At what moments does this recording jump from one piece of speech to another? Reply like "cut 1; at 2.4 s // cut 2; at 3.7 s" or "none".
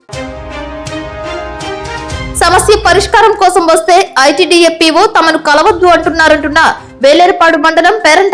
cut 1; at 2.0 s